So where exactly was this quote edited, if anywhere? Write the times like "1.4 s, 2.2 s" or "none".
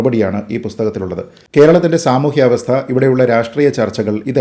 1.3 s

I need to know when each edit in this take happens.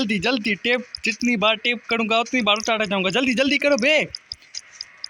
none

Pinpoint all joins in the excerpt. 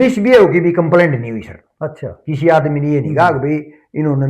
none

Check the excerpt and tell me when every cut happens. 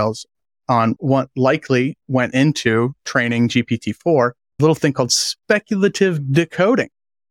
1.0 s, 4.6 s

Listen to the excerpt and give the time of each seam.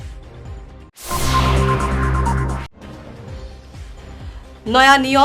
2.7 s

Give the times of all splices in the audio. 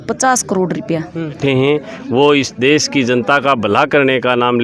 1.4 s

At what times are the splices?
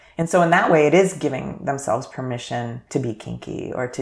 2.8 s

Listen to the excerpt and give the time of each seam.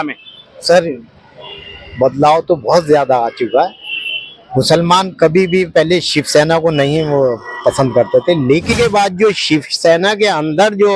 8.8 s

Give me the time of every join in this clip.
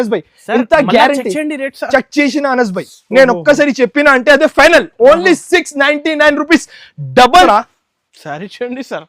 7.5 s

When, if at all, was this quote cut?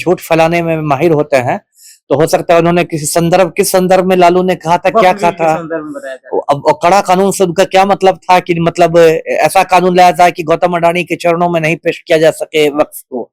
none

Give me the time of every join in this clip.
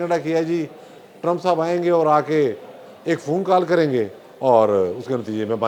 none

